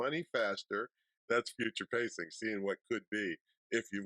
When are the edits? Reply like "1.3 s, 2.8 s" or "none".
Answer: 1.1 s